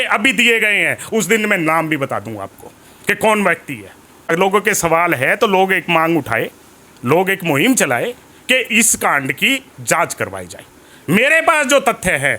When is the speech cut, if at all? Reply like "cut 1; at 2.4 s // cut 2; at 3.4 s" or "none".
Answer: cut 1; at 4.3 s